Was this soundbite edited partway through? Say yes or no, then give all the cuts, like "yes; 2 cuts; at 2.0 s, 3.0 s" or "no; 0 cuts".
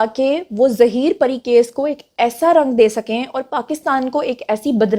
no; 0 cuts